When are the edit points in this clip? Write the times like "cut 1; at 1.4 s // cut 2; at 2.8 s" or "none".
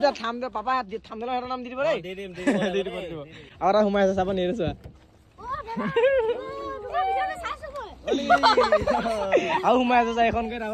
none